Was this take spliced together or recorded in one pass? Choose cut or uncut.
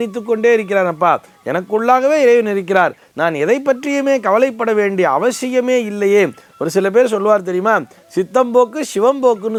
uncut